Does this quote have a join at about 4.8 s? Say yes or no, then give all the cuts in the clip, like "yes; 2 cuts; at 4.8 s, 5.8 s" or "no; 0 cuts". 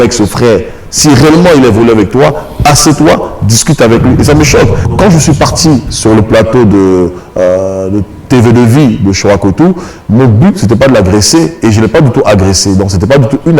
yes; 1 cut; at 4.8 s